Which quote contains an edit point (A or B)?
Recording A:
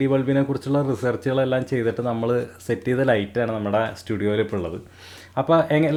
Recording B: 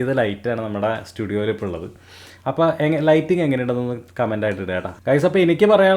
B